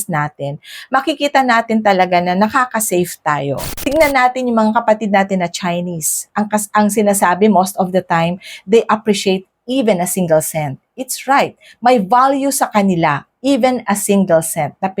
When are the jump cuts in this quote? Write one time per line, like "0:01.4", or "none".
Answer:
0:03.7